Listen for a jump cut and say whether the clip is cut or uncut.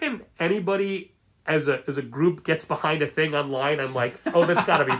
uncut